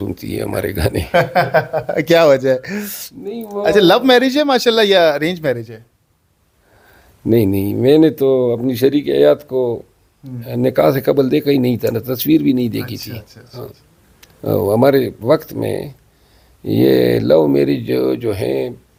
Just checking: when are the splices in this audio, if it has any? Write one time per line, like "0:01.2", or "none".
none